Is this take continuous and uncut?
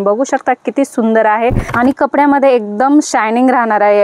no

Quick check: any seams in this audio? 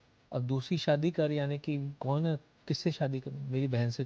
no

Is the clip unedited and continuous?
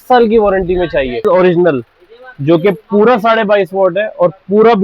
no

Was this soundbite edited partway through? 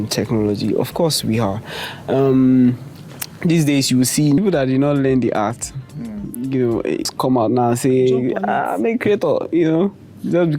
yes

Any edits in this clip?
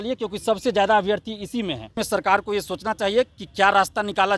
yes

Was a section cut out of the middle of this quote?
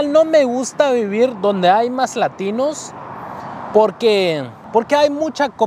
no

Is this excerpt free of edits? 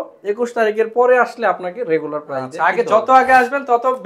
yes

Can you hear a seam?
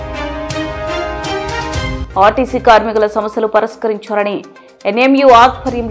yes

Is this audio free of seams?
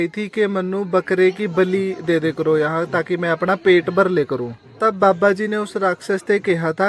yes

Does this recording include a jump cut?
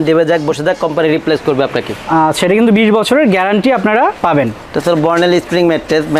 no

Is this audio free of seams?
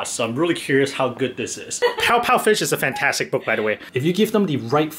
no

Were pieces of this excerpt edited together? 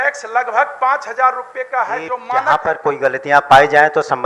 yes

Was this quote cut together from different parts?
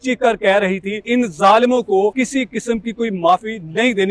yes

